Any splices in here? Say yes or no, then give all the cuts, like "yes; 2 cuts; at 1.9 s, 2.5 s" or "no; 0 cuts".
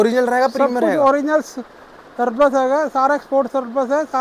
no; 0 cuts